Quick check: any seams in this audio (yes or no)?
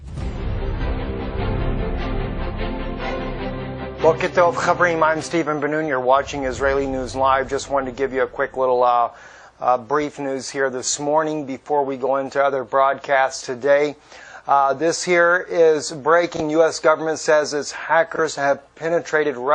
no